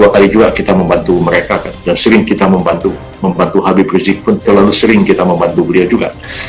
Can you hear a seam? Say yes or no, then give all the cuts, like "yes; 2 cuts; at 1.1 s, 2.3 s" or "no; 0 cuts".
no; 0 cuts